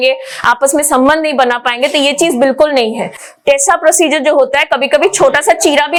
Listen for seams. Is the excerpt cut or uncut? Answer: uncut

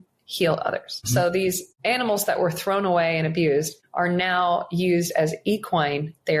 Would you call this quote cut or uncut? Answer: cut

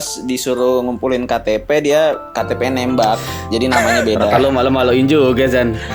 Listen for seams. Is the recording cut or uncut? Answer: uncut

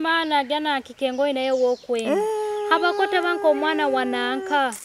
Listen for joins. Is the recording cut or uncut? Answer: uncut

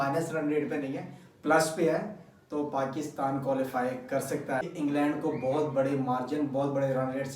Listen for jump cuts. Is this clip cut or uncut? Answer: cut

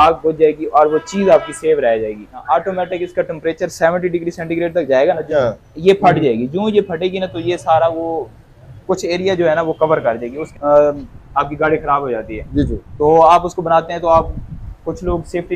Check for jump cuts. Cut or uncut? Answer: cut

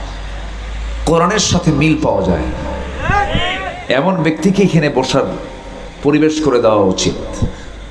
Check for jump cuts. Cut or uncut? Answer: uncut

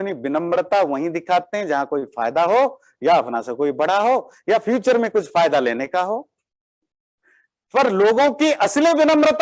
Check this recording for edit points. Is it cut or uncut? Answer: uncut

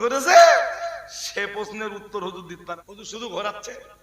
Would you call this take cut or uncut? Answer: cut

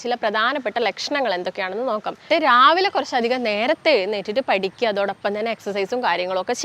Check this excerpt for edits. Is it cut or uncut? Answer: cut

